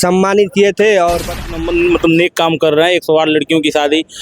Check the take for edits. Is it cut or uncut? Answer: cut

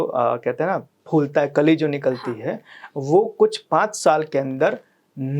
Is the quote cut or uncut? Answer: cut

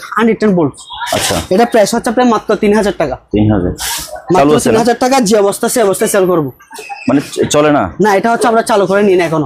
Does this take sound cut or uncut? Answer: uncut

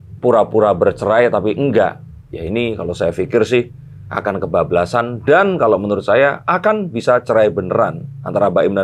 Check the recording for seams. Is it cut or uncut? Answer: uncut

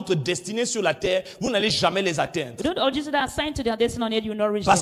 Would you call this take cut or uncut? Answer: uncut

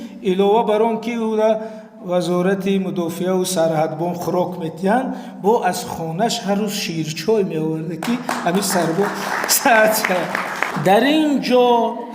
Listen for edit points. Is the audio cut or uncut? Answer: cut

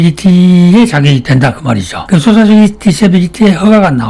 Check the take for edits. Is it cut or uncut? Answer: cut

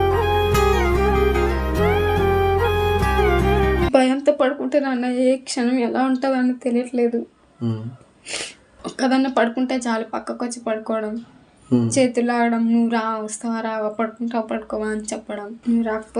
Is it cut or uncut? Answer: uncut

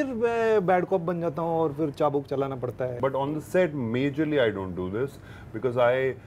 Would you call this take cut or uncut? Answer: cut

